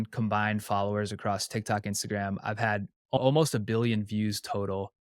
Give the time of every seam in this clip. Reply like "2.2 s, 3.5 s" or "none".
3.2 s